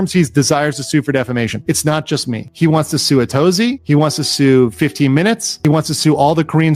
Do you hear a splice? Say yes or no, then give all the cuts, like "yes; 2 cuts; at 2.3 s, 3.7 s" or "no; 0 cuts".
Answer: yes; 1 cut; at 1.6 s